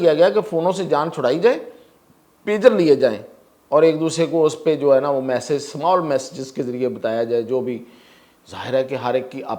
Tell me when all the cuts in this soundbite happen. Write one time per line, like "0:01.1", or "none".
none